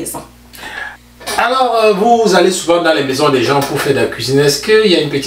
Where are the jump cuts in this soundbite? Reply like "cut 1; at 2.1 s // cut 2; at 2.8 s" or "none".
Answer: cut 1; at 0.9 s

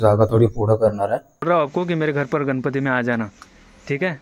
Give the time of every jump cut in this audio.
cut 1; at 1.4 s

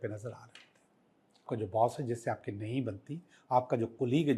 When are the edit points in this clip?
cut 1; at 1.5 s

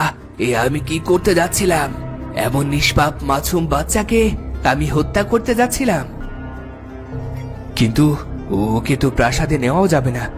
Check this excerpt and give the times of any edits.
cut 1; at 6.2 s

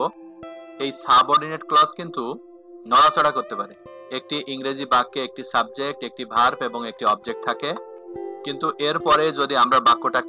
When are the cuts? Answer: cut 1; at 4.0 s // cut 2; at 7.9 s

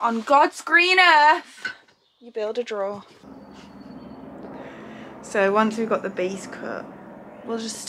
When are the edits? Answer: cut 1; at 3.2 s

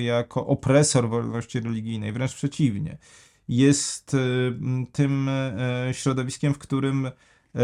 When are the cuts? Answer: none

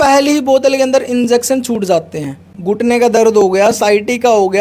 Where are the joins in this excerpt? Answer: cut 1; at 2.5 s

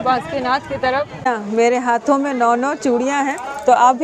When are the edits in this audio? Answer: cut 1; at 1.3 s

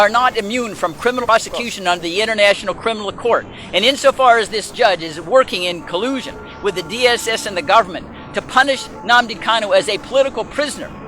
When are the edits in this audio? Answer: cut 1; at 1.2 s

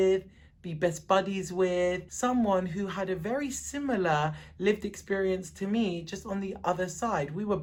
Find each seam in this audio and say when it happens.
none

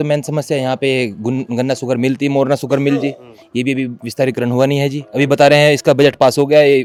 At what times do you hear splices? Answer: none

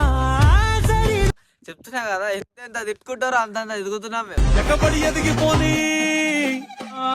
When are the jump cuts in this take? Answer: cut 1; at 1.3 s

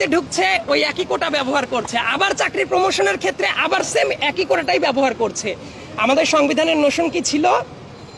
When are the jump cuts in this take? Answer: none

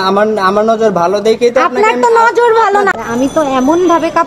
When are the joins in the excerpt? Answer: cut 1; at 2.9 s

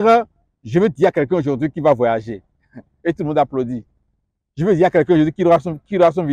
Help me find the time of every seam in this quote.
none

